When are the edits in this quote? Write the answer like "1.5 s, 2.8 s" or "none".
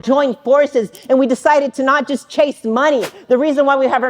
3.1 s